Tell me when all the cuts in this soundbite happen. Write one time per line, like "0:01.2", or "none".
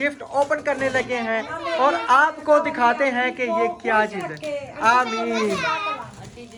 none

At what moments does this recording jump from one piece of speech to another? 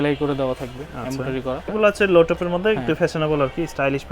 0:01.7

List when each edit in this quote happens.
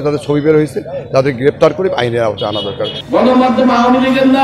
0:03.0

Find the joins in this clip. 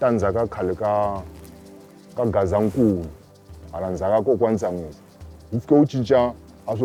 none

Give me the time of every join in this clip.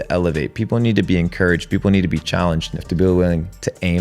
0:02.7

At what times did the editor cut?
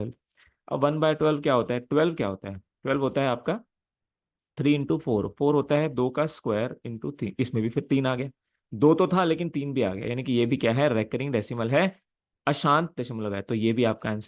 none

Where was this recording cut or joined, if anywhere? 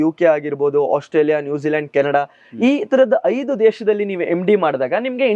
none

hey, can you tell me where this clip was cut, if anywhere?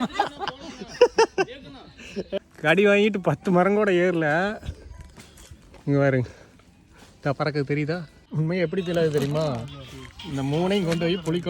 0:02.3
0:08.2

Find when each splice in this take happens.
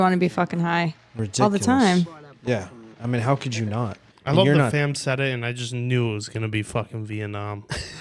none

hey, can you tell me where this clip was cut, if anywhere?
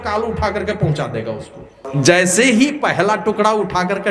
0:01.9

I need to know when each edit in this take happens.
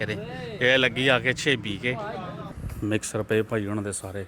0:02.4

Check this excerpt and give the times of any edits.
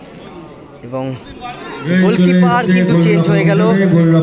0:01.6

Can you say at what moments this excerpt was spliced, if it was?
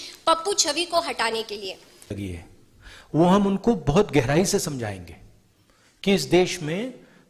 0:02.1

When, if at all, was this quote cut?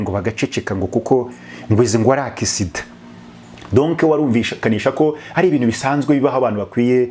none

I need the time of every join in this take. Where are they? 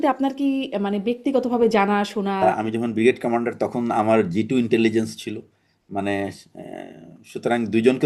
0:02.4

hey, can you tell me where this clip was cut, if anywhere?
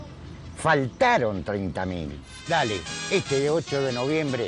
0:02.4

